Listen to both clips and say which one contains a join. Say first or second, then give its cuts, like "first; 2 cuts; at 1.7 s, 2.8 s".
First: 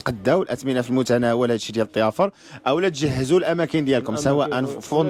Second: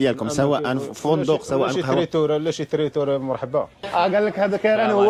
second; 1 cut; at 3.8 s